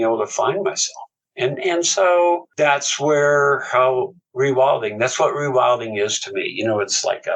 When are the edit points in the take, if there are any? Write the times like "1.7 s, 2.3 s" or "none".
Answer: none